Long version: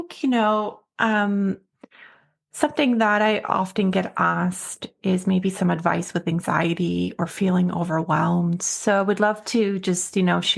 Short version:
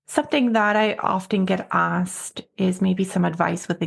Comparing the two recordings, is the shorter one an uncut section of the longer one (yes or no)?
yes